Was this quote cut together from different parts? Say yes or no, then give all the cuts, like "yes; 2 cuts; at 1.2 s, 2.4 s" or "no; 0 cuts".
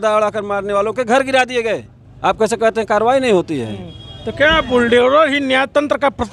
no; 0 cuts